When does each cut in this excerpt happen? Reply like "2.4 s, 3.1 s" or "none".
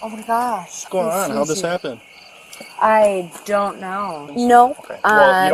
0.8 s, 4.2 s